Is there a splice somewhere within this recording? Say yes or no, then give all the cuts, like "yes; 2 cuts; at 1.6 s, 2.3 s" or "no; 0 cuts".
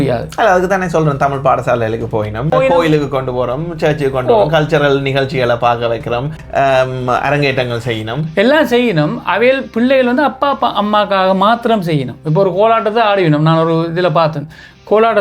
yes; 2 cuts; at 2.5 s, 6.4 s